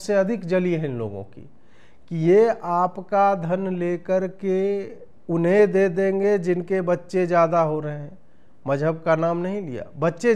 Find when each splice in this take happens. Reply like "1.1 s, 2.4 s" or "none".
none